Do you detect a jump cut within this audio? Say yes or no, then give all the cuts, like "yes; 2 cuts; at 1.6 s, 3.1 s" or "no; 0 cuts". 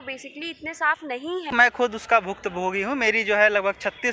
yes; 1 cut; at 1.5 s